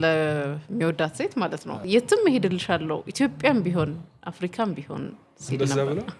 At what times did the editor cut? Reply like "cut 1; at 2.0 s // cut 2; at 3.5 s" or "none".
cut 1; at 1.7 s